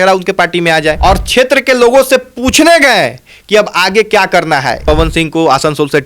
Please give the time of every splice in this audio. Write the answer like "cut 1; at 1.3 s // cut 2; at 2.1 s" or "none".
cut 1; at 1.0 s // cut 2; at 4.8 s